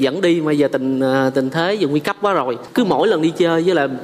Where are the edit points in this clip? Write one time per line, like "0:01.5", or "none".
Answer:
0:02.6